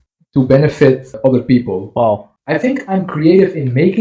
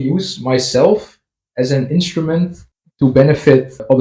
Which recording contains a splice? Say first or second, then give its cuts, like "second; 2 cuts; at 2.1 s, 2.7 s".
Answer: first; 1 cut; at 2.3 s